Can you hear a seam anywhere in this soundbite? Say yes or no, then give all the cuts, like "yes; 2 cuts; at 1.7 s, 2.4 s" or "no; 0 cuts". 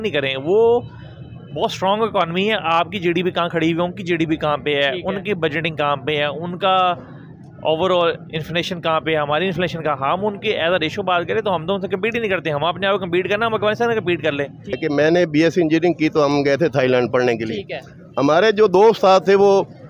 yes; 1 cut; at 14.8 s